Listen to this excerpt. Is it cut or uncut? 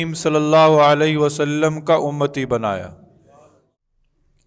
cut